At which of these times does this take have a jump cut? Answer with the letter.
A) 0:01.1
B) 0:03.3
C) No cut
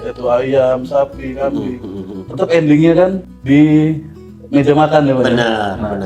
B